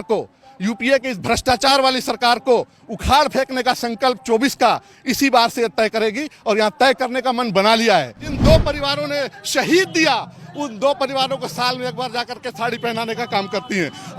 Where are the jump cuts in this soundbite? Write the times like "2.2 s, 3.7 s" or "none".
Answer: 8.3 s